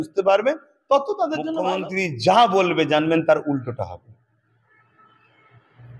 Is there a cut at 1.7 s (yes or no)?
yes